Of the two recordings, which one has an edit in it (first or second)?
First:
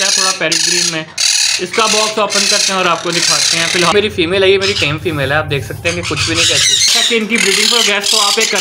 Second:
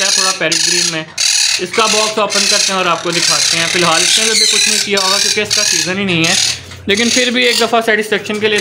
first